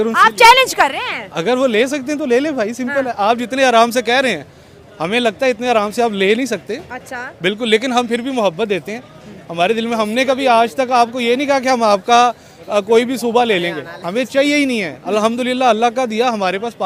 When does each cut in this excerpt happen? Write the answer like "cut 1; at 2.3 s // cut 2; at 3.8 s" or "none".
none